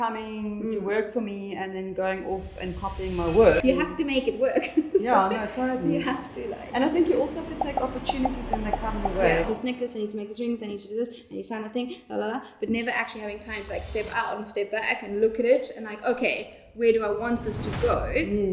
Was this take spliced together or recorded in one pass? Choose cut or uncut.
cut